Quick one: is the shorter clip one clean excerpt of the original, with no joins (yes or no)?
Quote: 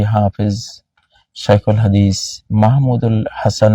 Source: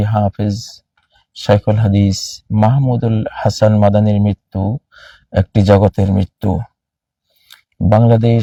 yes